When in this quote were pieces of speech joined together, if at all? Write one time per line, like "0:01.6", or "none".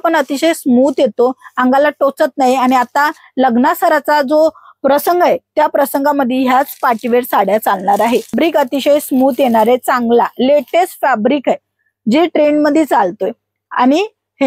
0:08.3